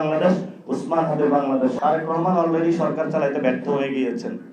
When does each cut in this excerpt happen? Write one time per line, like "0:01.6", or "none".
0:01.7